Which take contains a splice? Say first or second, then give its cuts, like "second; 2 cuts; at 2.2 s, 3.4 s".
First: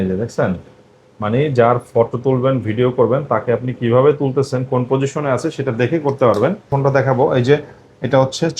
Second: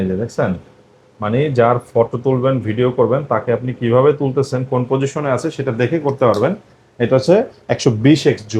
first; 1 cut; at 6.7 s